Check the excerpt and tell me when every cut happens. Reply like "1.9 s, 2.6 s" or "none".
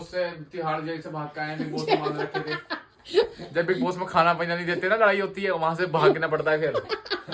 none